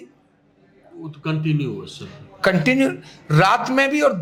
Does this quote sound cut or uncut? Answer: uncut